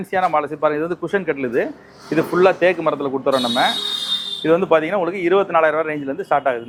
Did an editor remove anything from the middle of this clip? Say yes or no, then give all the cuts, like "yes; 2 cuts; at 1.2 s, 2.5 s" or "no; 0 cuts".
no; 0 cuts